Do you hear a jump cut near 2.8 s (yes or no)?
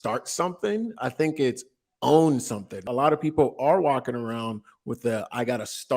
yes